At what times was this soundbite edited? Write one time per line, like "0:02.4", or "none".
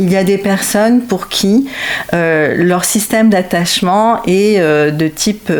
none